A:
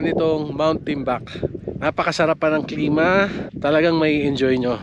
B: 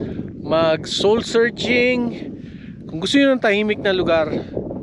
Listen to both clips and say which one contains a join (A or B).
A